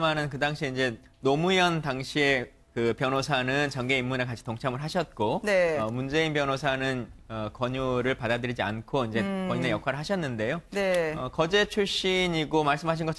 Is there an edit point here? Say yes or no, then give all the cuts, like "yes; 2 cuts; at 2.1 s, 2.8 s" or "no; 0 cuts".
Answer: yes; 1 cut; at 3.3 s